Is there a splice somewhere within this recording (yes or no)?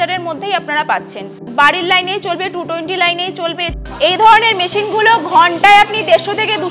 yes